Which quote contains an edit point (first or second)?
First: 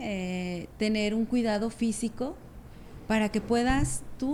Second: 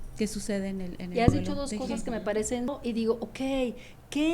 second